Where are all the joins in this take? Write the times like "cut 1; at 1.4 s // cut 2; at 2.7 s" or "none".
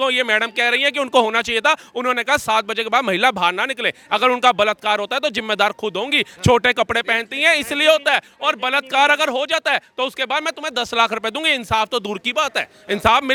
none

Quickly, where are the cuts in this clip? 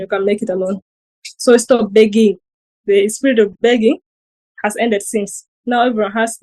none

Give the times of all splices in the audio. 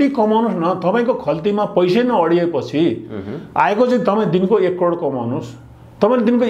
none

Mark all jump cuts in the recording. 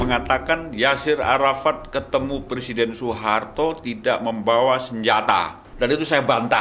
cut 1; at 5.6 s

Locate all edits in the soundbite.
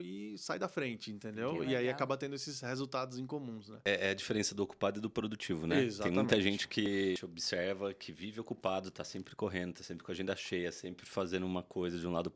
cut 1; at 4.0 s

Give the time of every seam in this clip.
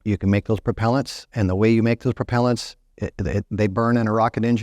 cut 1; at 1.3 s

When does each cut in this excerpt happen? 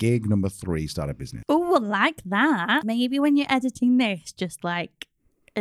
cut 1; at 1.2 s // cut 2; at 2.8 s

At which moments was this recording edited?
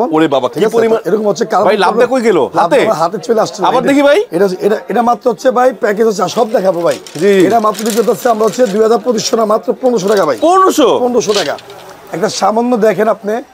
none

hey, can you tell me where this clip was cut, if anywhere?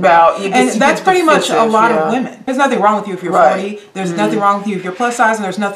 cut 1; at 2.4 s

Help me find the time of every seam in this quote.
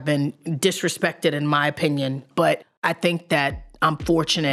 cut 1; at 2.7 s

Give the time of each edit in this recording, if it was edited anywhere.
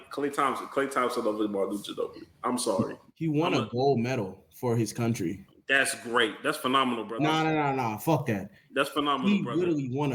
none

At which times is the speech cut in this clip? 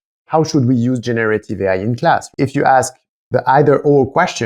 cut 1; at 2.4 s

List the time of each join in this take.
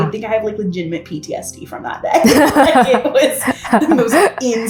none

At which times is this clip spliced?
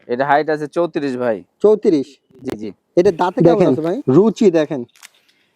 cut 1; at 3.4 s

